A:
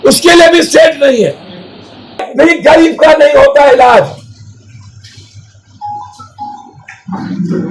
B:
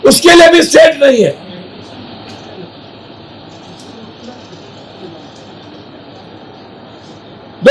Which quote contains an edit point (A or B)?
A